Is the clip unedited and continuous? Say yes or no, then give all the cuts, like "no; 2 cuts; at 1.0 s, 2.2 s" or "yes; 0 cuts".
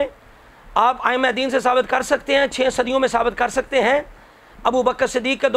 yes; 0 cuts